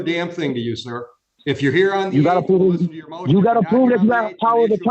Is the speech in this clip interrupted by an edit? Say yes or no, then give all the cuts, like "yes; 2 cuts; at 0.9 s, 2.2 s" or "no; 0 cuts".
no; 0 cuts